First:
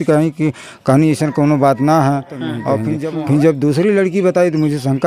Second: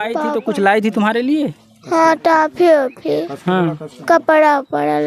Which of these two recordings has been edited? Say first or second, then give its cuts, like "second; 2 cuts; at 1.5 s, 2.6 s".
first; 1 cut; at 2.9 s